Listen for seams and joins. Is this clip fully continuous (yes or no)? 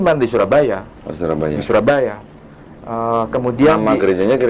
yes